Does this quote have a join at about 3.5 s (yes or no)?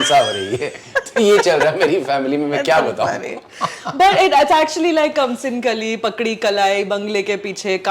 no